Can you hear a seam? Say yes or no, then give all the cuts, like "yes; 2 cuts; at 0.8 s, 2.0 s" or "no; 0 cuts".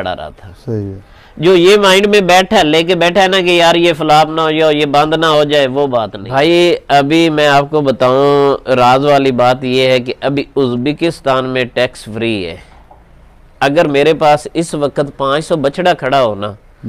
yes; 1 cut; at 6.1 s